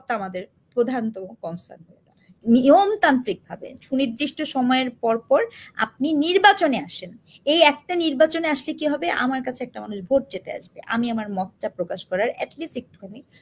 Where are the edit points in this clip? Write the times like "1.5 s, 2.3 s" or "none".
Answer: 2.4 s